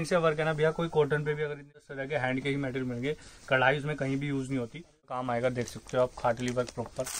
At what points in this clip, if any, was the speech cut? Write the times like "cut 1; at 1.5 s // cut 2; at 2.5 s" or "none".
cut 1; at 1.8 s // cut 2; at 5.2 s